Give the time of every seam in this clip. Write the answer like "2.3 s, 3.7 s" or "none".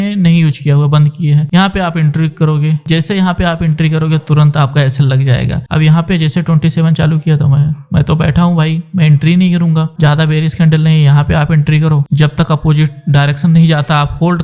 5.6 s, 9.9 s